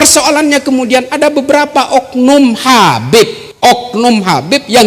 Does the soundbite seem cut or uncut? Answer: cut